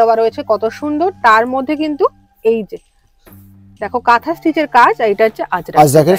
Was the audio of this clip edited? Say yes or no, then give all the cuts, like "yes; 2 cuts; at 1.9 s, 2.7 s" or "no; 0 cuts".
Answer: no; 0 cuts